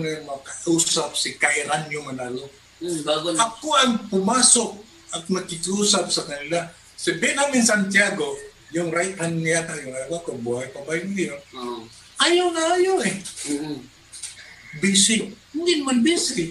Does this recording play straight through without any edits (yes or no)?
yes